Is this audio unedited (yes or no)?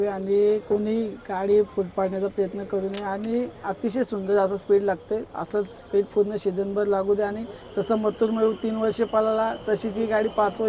yes